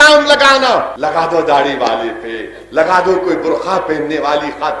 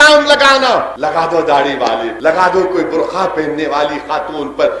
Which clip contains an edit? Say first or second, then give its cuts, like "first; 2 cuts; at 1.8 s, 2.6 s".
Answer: second; 1 cut; at 2.1 s